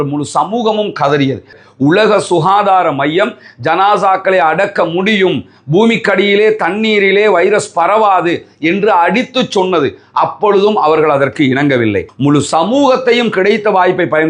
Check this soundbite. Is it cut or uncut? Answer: cut